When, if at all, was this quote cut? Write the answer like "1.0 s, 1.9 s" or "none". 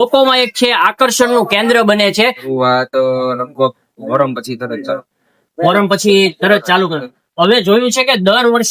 2.4 s